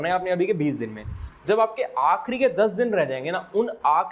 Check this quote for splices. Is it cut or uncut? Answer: uncut